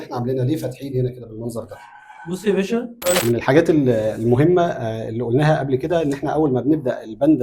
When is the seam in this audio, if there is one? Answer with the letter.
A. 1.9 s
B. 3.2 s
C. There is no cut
B